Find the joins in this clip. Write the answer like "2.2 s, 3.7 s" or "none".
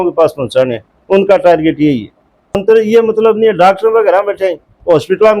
2.6 s